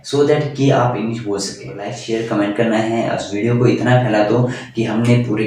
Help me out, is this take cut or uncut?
cut